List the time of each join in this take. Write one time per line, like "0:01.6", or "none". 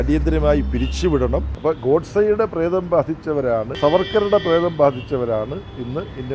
0:01.5
0:03.7